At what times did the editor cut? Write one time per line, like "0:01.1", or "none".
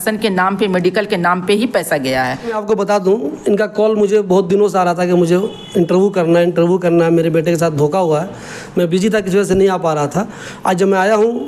none